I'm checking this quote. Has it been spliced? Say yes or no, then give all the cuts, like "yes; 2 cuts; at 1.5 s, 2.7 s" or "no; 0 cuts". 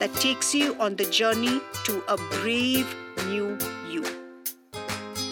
yes; 1 cut; at 4.0 s